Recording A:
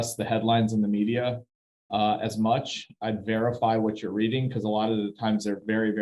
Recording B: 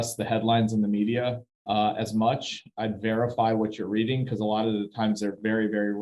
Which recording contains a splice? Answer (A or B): B